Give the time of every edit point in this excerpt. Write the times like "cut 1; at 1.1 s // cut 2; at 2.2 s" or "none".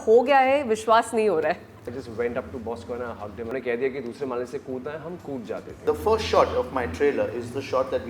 cut 1; at 1.8 s // cut 2; at 3.5 s // cut 3; at 5.8 s